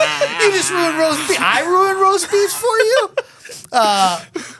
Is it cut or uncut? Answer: uncut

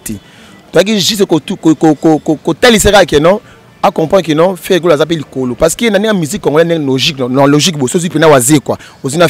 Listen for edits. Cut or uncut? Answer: uncut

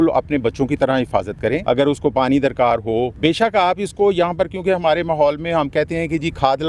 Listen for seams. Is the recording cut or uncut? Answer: cut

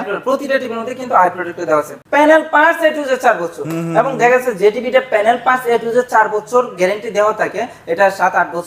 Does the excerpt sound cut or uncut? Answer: cut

